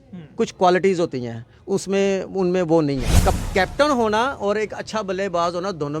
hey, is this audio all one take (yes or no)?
no